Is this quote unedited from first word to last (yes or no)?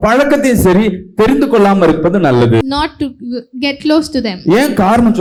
yes